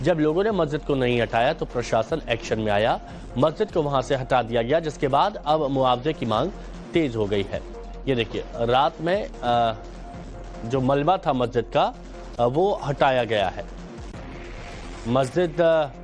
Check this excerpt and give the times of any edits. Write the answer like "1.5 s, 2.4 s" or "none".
3.2 s